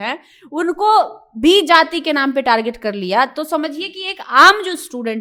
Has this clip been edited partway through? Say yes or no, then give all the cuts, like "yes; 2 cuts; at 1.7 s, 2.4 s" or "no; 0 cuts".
no; 0 cuts